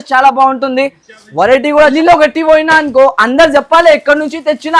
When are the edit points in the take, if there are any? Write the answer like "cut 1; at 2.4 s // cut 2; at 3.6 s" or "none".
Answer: cut 1; at 1.9 s

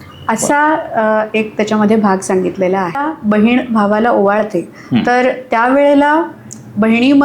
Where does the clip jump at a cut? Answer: cut 1; at 3.1 s

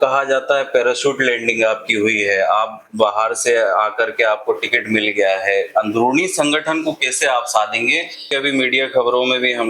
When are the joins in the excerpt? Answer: cut 1; at 8.3 s

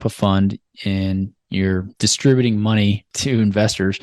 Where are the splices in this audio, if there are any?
cut 1; at 1.9 s // cut 2; at 3.1 s

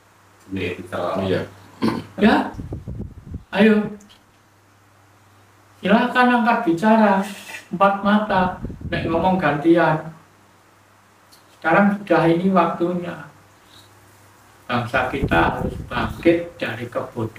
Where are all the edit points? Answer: none

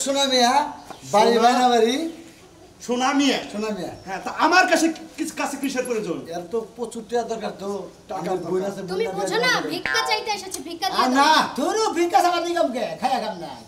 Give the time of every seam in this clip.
none

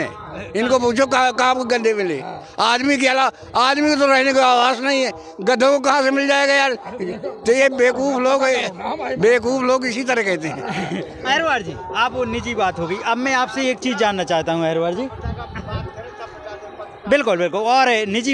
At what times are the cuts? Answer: none

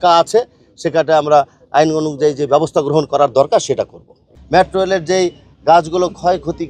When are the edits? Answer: cut 1; at 4.3 s

